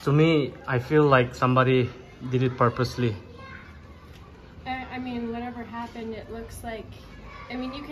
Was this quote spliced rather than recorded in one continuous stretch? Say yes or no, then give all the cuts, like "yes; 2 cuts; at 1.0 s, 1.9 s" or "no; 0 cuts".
no; 0 cuts